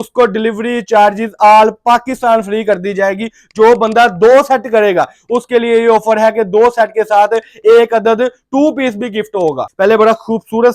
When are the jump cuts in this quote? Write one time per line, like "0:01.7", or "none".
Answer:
0:09.7